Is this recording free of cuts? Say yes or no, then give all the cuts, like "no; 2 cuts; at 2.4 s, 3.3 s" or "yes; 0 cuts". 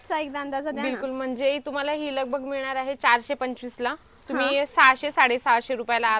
yes; 0 cuts